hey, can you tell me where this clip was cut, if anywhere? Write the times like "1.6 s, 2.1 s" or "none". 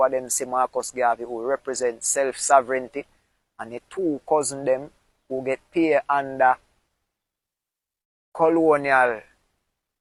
none